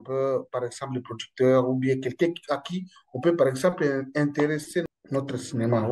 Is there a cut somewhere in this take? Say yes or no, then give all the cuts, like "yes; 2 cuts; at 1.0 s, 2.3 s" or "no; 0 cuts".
yes; 1 cut; at 4.9 s